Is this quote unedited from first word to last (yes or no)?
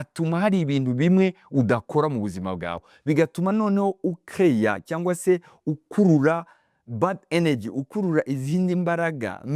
no